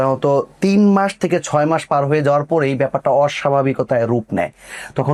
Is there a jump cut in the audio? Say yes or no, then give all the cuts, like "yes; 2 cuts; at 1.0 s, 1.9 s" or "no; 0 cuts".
no; 0 cuts